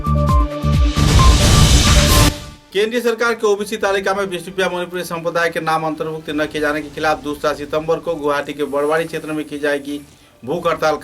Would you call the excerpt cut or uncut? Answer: cut